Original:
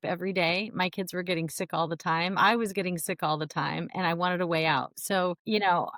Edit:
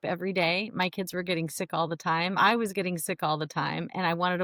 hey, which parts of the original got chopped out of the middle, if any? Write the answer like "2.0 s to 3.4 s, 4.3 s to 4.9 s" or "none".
none